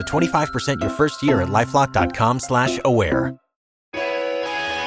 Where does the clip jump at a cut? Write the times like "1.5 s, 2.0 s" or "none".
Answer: 3.9 s